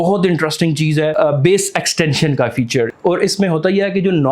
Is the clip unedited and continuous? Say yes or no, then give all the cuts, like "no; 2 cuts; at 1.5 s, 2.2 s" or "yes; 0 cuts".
no; 2 cuts; at 1.1 s, 2.9 s